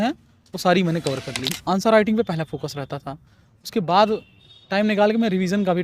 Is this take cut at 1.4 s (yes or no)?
yes